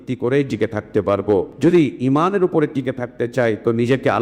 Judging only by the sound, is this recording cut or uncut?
cut